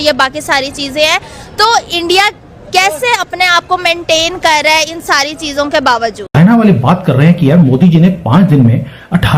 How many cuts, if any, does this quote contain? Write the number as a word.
one